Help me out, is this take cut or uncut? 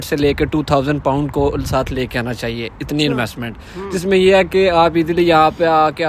uncut